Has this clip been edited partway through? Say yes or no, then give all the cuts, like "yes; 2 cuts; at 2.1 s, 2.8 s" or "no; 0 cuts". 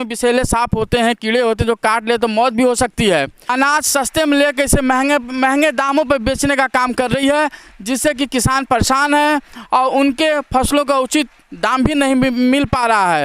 yes; 1 cut; at 3.5 s